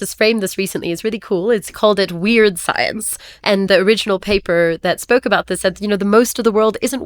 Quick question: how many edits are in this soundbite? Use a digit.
2